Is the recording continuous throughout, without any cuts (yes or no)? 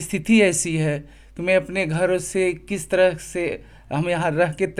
yes